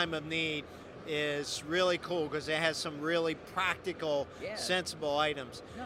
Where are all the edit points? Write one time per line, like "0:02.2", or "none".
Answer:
none